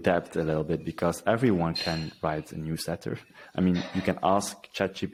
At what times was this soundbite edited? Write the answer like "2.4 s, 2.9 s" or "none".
none